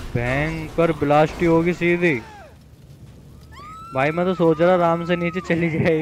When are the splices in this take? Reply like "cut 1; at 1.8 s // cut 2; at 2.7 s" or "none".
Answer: none